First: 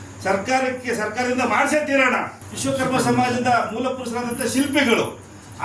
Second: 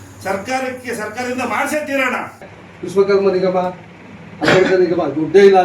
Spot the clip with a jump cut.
second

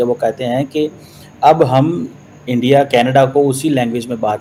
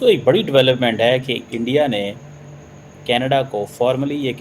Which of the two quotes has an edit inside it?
second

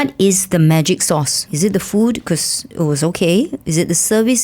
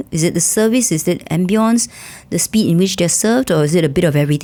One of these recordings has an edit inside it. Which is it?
first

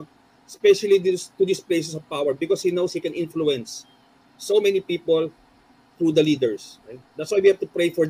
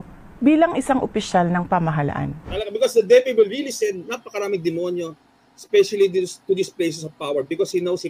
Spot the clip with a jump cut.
second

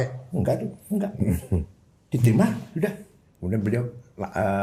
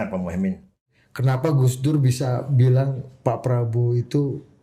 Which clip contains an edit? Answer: second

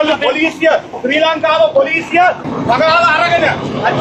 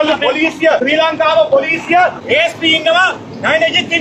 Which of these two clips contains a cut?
second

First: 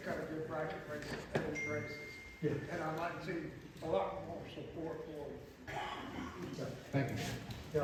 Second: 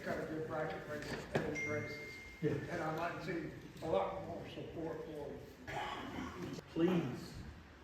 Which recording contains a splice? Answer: second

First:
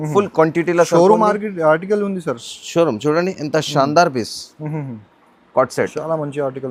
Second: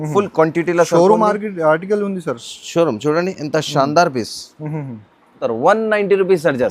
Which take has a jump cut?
second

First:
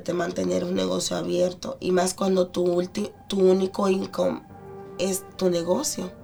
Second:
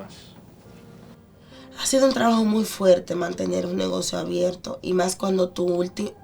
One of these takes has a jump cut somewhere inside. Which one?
second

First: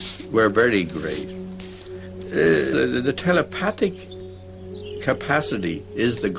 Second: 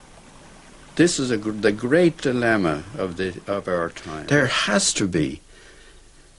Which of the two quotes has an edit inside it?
second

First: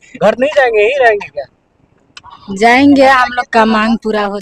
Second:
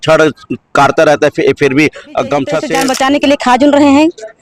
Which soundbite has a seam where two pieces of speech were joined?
second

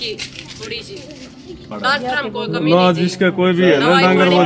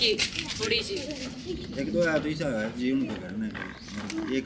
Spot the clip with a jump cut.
first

